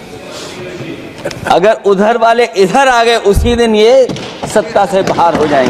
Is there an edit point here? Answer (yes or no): no